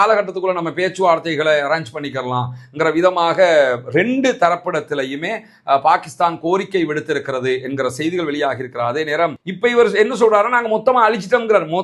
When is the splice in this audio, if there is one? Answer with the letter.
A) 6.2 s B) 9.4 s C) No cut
B